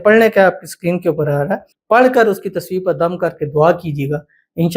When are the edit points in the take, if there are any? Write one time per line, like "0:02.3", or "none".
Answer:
0:01.7